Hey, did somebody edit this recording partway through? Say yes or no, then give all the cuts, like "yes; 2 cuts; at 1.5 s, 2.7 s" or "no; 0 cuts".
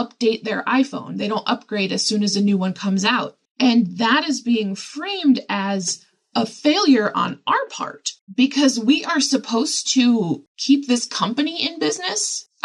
no; 0 cuts